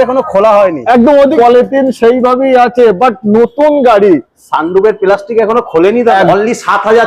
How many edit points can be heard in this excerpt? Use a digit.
2